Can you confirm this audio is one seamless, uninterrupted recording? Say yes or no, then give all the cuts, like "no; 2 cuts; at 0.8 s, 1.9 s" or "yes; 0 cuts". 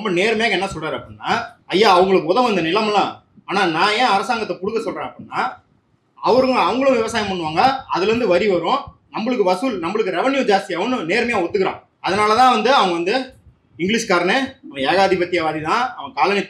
no; 2 cuts; at 1.6 s, 11.9 s